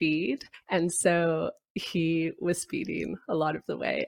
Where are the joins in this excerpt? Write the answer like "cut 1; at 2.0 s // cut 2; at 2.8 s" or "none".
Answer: none